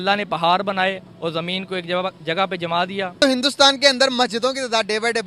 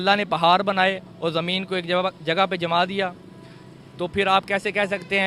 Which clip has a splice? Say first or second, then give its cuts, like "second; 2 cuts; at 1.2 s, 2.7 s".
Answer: first; 1 cut; at 3.2 s